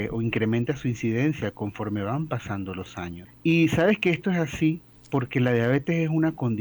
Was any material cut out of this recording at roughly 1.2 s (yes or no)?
no